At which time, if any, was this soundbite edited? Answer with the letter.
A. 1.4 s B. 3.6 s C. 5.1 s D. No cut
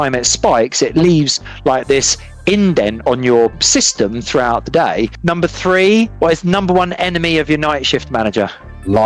C